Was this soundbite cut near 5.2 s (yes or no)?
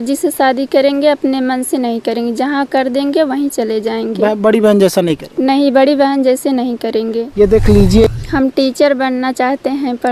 no